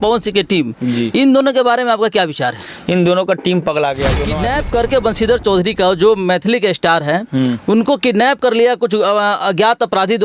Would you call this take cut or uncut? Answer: cut